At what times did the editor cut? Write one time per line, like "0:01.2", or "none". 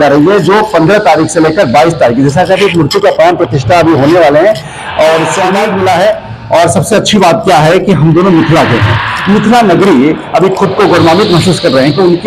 0:05.4